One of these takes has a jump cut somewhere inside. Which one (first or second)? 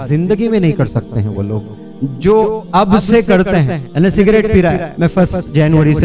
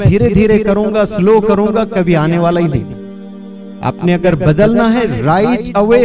first